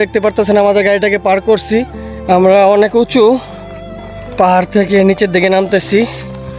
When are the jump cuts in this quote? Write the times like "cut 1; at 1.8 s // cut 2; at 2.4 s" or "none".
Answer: none